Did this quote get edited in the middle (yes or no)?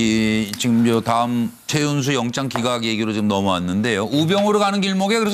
no